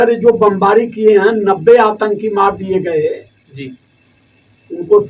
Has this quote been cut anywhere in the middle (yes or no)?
no